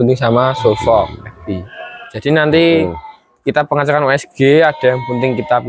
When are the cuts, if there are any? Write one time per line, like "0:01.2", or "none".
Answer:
0:02.1

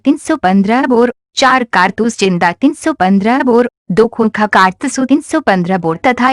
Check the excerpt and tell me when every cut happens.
0:01.5
0:04.0

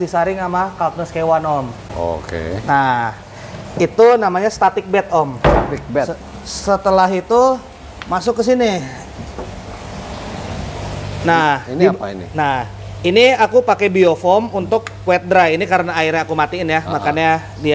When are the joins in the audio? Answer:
none

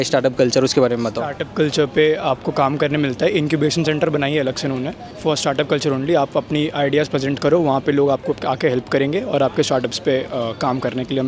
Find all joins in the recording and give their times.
none

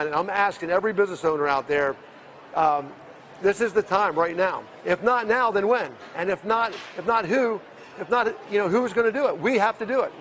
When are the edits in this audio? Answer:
none

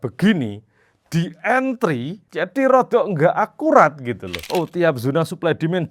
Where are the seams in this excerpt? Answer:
0:04.4

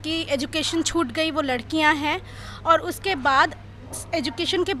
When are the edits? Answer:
none

